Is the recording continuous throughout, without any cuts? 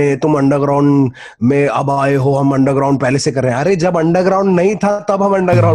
yes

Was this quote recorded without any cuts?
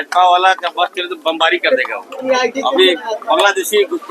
no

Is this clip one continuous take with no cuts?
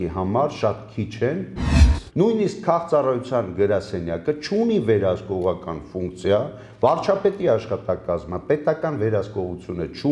no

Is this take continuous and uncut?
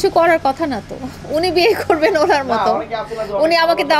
yes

